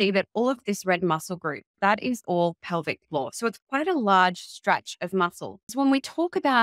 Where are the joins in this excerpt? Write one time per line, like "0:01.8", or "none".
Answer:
0:05.7